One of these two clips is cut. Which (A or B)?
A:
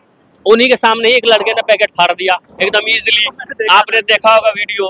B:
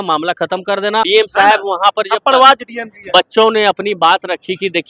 B